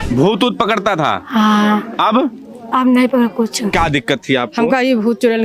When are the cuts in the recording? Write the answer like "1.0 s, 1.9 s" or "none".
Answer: 3.7 s

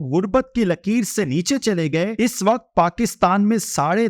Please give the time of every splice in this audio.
2.1 s

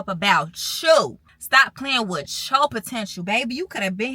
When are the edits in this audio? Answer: 1.3 s

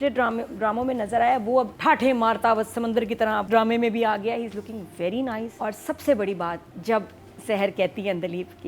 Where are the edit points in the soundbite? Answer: 1.7 s, 3.4 s, 5.5 s, 6.7 s

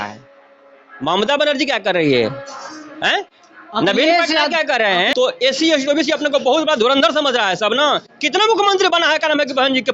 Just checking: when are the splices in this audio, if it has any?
5.1 s

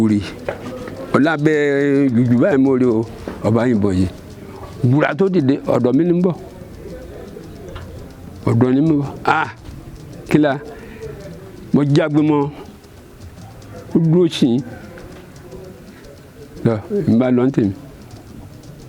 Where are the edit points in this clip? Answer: none

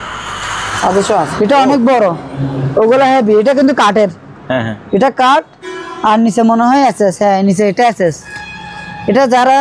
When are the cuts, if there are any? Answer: 1.3 s

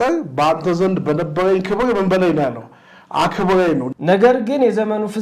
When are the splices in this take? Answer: 3.9 s

